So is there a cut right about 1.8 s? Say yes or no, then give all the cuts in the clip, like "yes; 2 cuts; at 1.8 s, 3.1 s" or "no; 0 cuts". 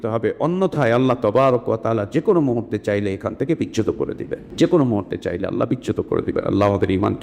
no; 1 cut; at 4.5 s